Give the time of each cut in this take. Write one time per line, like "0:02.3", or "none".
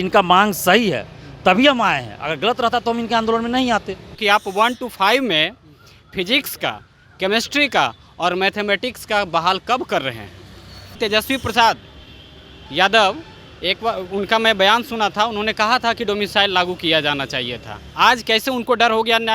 0:04.2
0:11.0